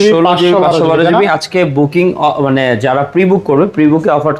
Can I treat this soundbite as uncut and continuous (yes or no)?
yes